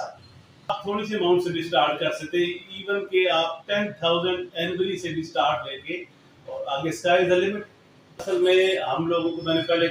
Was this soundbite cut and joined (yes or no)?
yes